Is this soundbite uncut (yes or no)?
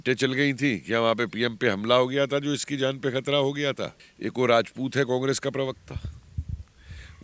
no